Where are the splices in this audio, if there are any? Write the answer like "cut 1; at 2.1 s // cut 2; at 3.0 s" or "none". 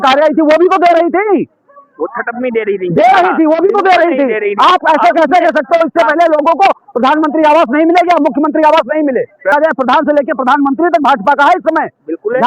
cut 1; at 9.5 s